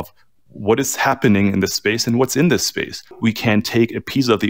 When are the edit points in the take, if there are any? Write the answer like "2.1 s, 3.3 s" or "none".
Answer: 3.2 s